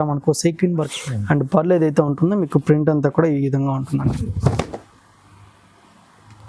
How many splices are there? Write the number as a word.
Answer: one